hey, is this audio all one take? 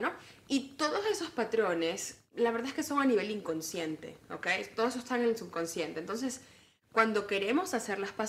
yes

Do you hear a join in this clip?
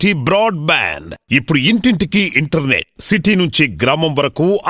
no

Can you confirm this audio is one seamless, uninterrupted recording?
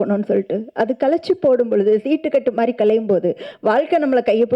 yes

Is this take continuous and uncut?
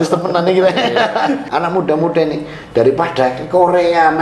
no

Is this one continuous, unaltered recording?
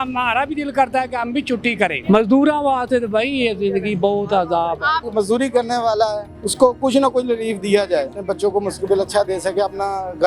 no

